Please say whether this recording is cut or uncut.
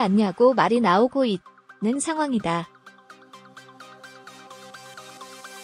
cut